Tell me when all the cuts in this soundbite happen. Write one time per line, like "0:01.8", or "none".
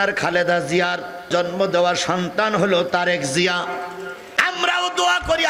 none